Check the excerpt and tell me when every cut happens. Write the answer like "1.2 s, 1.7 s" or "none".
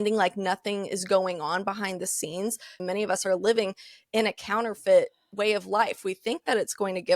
3.1 s